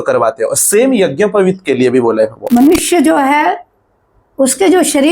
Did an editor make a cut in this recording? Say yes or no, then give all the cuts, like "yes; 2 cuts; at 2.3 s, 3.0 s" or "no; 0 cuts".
yes; 1 cut; at 2.4 s